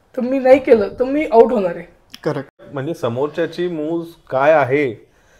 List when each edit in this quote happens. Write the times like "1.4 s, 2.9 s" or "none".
2.7 s